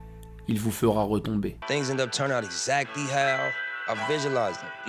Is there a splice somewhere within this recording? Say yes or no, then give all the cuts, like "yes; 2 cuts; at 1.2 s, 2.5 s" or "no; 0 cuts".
yes; 1 cut; at 1.6 s